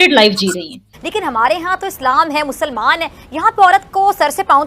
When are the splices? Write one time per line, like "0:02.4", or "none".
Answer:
0:00.9